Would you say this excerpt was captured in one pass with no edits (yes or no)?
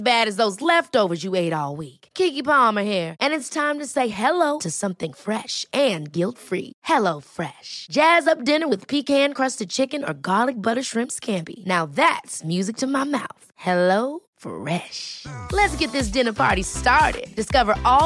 yes